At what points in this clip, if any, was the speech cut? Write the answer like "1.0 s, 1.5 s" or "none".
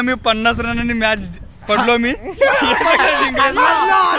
none